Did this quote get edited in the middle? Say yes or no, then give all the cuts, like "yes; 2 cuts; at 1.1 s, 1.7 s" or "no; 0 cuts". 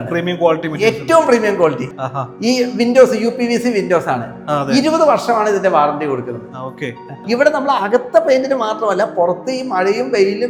no; 0 cuts